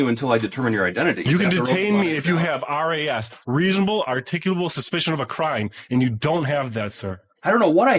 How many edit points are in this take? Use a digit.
0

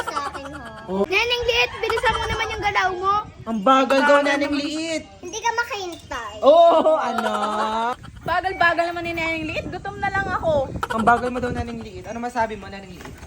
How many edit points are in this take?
2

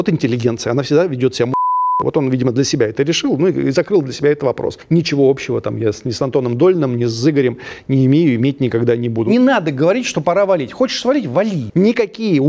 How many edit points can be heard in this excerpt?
3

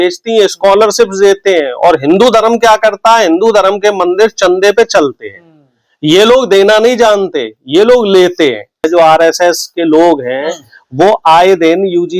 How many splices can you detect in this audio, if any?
1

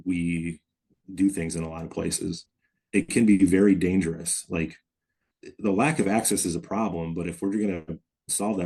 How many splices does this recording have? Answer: 0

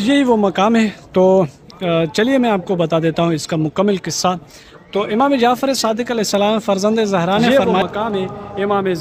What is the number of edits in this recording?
1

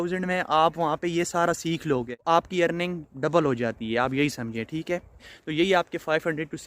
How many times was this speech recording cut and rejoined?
2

